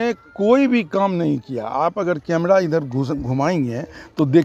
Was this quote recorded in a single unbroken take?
yes; 0 cuts

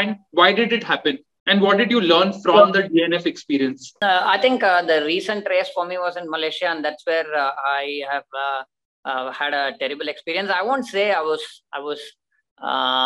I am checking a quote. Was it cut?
yes; 1 cut; at 3.9 s

